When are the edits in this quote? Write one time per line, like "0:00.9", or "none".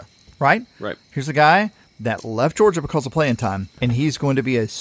0:03.7